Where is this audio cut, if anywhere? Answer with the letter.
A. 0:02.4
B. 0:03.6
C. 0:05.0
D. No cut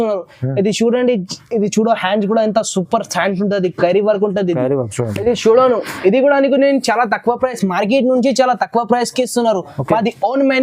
C